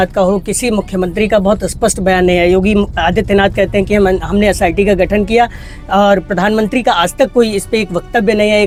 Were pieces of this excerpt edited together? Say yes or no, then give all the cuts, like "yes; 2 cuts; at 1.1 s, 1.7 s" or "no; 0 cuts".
no; 0 cuts